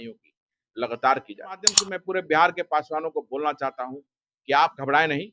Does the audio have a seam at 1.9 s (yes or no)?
yes